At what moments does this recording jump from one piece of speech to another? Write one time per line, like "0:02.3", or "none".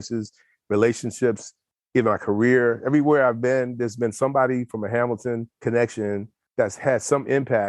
0:05.5